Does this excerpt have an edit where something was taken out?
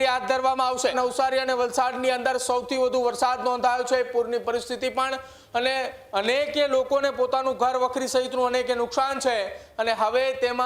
yes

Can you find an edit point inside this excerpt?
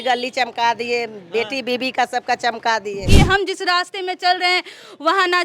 yes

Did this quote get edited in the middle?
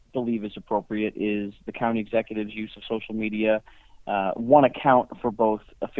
no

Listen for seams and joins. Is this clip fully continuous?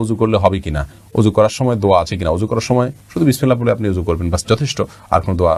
yes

